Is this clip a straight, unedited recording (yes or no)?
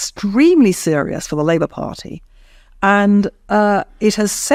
yes